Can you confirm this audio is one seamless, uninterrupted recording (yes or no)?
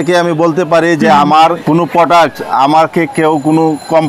no